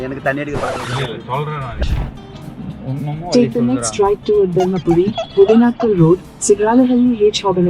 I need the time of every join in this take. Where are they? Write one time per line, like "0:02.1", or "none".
0:01.8